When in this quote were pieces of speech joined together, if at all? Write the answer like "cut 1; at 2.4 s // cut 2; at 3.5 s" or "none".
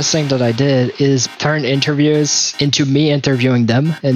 cut 1; at 1.2 s